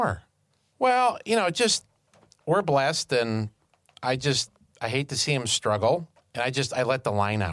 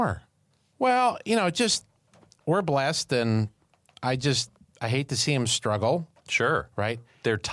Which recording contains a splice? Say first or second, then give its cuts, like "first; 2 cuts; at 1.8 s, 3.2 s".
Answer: second; 1 cut; at 6.2 s